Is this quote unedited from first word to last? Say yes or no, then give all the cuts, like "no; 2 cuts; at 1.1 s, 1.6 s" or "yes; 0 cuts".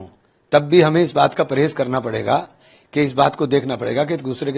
yes; 0 cuts